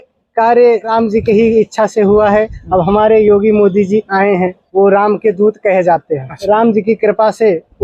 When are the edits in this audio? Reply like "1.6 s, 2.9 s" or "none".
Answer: 0.9 s, 4.6 s, 6.3 s